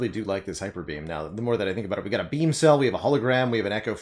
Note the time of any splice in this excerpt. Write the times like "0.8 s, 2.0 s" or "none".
none